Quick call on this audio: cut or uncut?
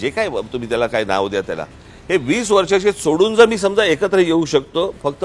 uncut